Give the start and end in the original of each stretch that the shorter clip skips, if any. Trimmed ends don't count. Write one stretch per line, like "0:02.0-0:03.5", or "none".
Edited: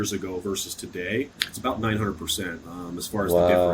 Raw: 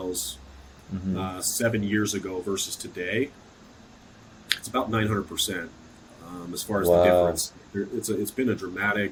0:03.4-0:04.5
0:05.8-0:06.2